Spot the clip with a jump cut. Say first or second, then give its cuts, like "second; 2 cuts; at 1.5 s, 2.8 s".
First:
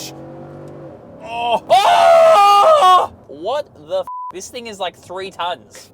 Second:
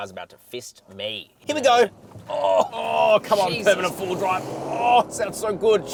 first; 2 cuts; at 1.6 s, 3.3 s